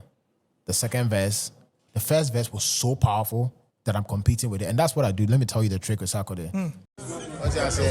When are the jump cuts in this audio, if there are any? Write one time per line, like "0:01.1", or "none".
0:06.8

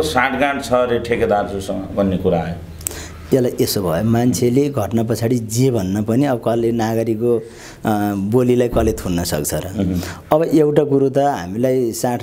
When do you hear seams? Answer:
none

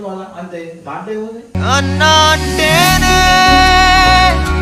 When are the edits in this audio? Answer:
none

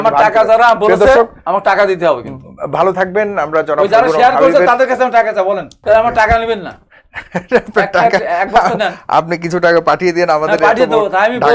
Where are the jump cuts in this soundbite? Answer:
0:05.7

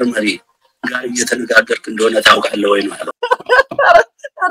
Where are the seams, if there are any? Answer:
none

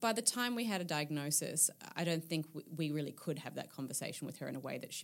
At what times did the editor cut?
none

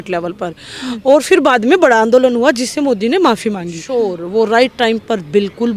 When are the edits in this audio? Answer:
0:03.8

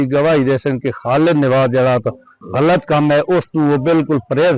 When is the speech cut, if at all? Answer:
0:02.4

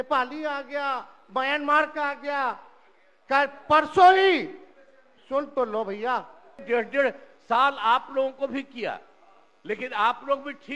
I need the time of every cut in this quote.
0:06.6

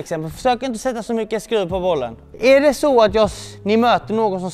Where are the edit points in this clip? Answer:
0:02.2

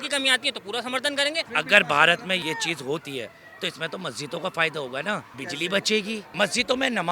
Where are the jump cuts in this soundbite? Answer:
0:01.5
0:02.4
0:05.4
0:06.3

